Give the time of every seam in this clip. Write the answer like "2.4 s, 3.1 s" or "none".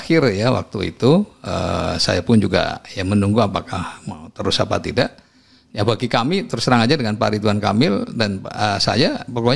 none